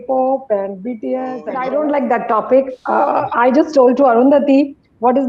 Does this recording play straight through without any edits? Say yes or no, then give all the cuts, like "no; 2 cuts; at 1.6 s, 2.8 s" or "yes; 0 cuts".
no; 1 cut; at 1.5 s